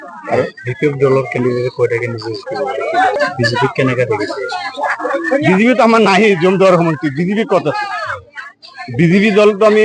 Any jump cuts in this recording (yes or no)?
yes